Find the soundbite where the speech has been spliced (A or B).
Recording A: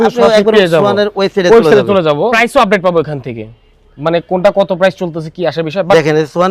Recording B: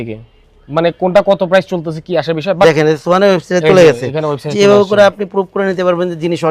A